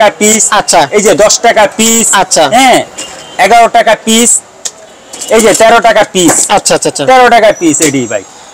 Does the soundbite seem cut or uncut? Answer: uncut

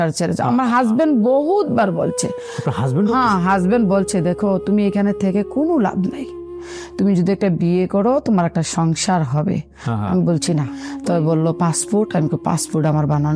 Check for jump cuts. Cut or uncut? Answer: cut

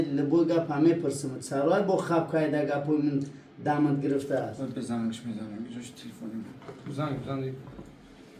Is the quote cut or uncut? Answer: uncut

